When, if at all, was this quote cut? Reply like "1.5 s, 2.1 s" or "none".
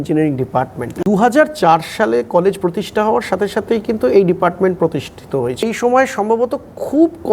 1.0 s, 5.6 s